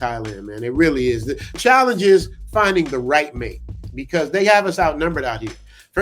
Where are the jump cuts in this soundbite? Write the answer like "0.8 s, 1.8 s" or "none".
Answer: 1.6 s